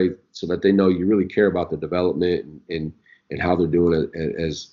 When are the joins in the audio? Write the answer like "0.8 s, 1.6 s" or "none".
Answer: none